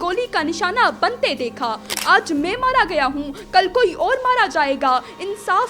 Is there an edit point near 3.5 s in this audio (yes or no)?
no